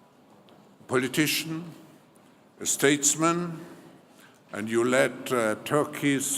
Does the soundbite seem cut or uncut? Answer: cut